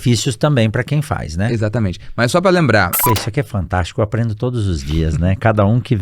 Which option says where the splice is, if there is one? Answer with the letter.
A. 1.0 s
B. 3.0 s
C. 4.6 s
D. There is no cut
B